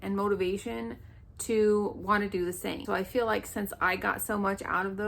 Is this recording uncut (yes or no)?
no